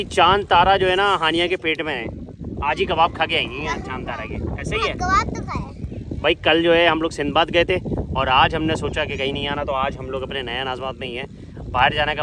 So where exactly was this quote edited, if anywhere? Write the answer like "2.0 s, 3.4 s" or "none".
none